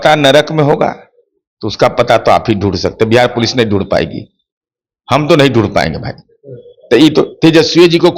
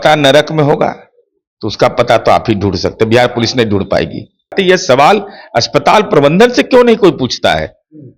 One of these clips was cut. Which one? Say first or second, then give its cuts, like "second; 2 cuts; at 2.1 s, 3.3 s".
second; 1 cut; at 4.5 s